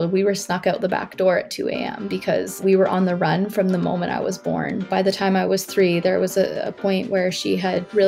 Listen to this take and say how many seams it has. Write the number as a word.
two